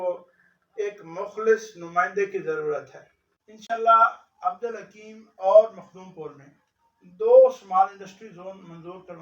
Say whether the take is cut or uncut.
cut